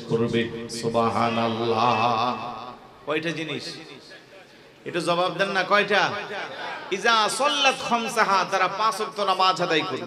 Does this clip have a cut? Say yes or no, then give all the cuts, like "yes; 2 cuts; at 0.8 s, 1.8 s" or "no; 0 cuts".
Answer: no; 0 cuts